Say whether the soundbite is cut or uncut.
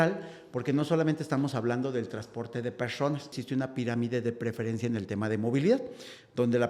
cut